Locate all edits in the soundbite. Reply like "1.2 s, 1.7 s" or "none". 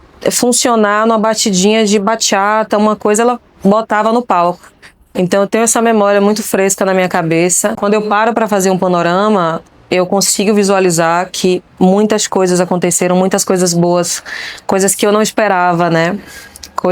7.8 s